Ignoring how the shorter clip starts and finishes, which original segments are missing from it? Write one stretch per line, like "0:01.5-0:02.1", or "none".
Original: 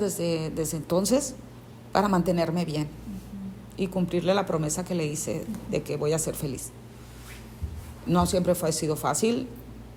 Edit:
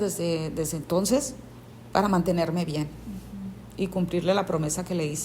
none